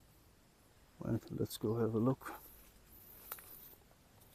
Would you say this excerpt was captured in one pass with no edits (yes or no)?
yes